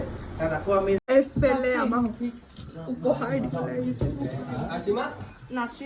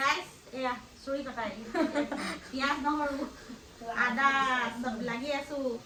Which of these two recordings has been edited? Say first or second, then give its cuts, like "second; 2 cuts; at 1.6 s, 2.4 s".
first; 1 cut; at 1.0 s